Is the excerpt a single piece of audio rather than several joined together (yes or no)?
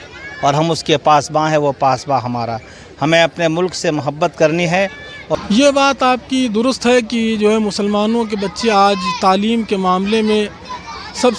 no